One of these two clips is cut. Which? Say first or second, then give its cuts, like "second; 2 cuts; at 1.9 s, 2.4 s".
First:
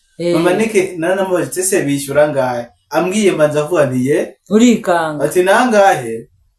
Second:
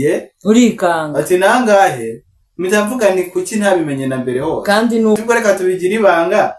second; 1 cut; at 5.2 s